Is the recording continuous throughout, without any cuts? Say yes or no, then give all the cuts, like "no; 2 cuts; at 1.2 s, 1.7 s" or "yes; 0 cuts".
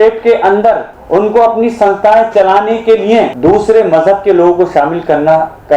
no; 2 cuts; at 0.9 s, 3.3 s